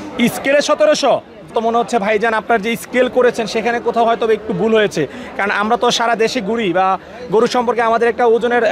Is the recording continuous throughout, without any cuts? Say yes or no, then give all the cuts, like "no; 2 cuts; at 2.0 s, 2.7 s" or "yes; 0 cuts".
no; 1 cut; at 1.5 s